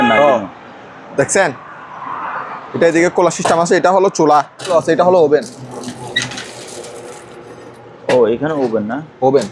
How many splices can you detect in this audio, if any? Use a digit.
1